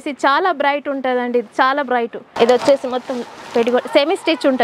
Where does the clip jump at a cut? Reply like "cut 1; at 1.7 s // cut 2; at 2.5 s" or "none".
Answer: cut 1; at 2.3 s